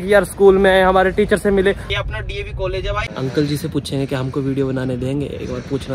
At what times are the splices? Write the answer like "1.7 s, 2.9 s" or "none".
1.9 s, 3.1 s